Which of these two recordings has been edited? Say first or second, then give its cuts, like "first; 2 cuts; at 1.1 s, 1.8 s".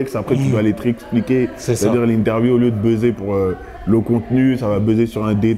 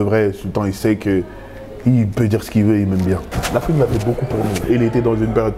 second; 1 cut; at 3.3 s